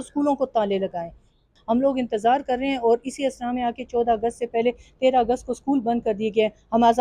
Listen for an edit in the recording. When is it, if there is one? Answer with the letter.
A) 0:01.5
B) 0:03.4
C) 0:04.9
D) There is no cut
A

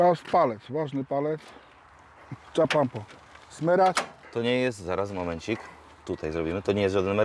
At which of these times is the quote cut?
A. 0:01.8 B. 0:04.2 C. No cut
B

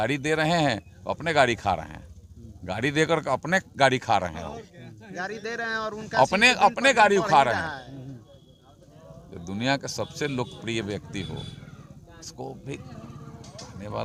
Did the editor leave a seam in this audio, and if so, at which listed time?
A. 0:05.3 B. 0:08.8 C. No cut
C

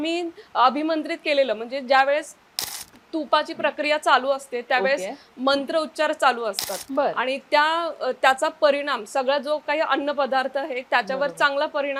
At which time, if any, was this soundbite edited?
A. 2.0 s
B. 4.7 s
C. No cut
C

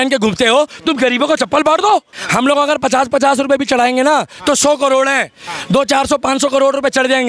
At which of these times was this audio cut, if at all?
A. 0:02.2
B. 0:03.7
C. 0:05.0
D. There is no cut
A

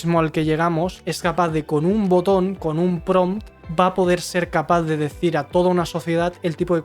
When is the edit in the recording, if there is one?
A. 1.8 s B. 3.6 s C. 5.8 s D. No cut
B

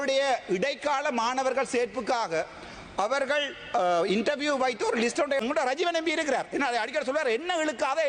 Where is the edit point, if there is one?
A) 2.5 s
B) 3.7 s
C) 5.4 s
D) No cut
C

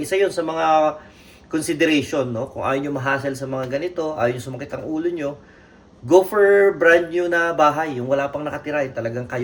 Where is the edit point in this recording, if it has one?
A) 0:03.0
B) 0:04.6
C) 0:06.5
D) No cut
D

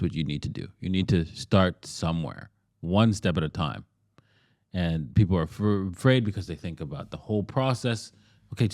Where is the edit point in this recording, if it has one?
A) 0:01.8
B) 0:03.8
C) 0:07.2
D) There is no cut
D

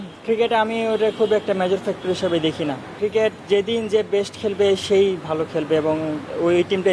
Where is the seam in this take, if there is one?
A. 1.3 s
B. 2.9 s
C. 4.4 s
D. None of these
B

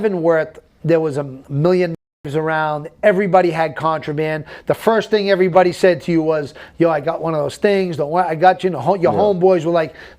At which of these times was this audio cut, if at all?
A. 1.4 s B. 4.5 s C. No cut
A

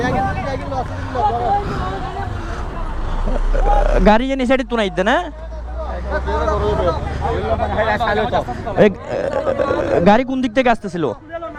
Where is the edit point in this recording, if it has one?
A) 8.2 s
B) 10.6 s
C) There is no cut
C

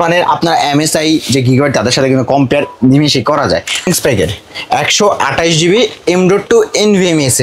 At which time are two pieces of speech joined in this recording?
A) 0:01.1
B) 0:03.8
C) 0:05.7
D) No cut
B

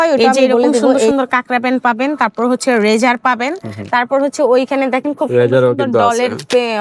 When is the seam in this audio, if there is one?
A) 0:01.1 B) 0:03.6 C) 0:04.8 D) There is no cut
A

